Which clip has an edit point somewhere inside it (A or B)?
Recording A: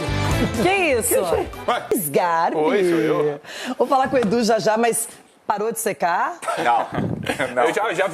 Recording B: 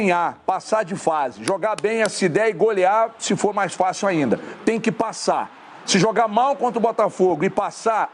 A